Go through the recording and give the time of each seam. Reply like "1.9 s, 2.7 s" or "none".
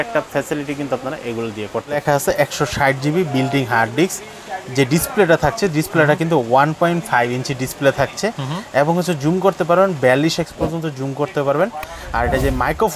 2.0 s